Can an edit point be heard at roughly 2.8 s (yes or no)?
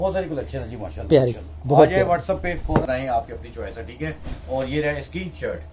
yes